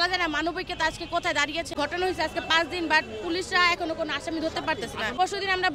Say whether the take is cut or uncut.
cut